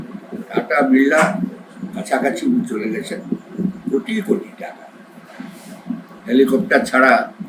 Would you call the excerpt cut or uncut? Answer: uncut